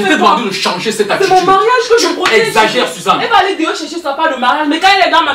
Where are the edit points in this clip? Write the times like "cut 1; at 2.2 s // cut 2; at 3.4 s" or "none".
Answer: none

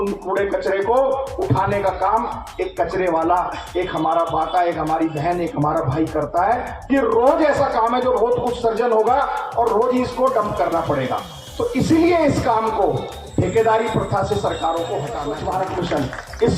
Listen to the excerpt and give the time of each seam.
cut 1; at 15.2 s

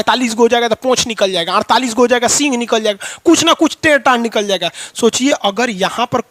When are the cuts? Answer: none

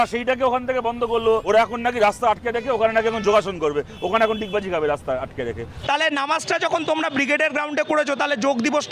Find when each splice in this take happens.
cut 1; at 1.4 s // cut 2; at 5.7 s

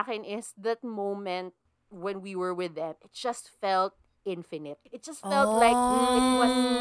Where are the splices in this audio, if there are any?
cut 1; at 4.8 s

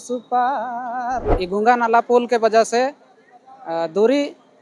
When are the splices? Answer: cut 1; at 1.3 s

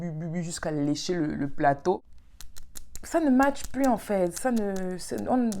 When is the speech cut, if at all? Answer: cut 1; at 2.2 s

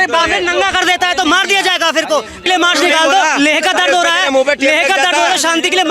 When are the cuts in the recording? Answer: cut 1; at 2.4 s

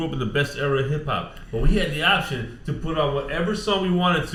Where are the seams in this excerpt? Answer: none

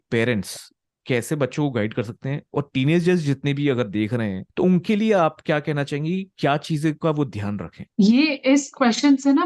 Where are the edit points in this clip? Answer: cut 1; at 4.4 s

